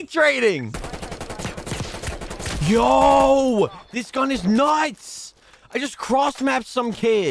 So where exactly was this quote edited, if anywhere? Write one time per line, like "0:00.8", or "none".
none